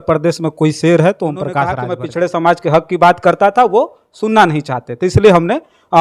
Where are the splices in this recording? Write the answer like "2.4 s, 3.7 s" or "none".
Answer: 1.8 s